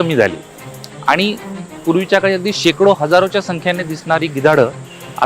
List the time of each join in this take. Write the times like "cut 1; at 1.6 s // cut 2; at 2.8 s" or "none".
none